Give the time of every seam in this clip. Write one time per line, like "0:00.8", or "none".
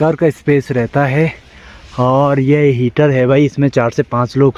none